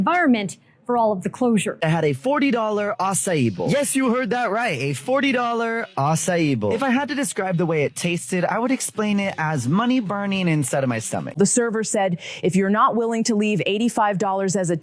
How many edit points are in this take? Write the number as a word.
three